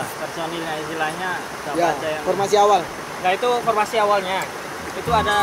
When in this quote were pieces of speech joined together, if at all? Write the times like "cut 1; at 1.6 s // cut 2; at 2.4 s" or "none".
none